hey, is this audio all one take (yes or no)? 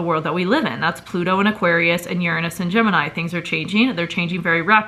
yes